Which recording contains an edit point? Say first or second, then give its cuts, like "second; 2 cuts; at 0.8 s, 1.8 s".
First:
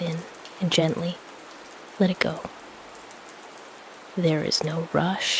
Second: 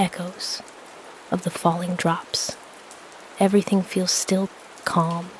first; 2 cuts; at 2.5 s, 4.1 s